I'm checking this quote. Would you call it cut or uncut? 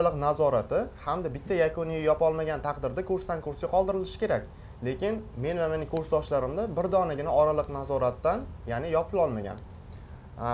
uncut